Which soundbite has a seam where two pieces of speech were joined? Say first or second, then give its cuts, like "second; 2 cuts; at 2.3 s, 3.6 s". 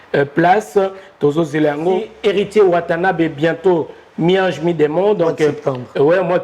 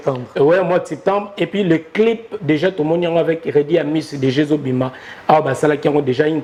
first; 1 cut; at 2.1 s